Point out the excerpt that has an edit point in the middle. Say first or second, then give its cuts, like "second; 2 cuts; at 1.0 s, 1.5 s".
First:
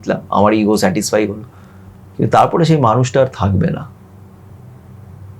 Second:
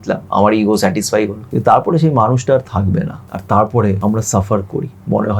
second; 3 cuts; at 1.4 s, 3.3 s, 4.0 s